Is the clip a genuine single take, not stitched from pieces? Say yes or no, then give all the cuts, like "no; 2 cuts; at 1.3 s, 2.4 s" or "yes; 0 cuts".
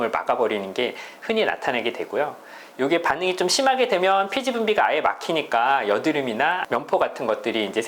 no; 1 cut; at 6.6 s